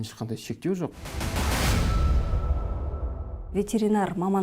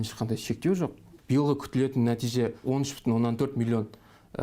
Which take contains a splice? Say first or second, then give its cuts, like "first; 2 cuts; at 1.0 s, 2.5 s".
second; 2 cuts; at 1.1 s, 2.6 s